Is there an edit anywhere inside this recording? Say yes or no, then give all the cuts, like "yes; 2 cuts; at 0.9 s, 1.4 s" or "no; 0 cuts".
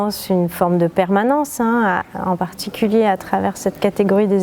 no; 0 cuts